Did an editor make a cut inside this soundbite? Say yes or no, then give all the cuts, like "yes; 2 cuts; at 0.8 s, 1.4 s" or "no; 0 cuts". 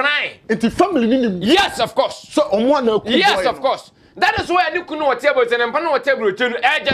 no; 0 cuts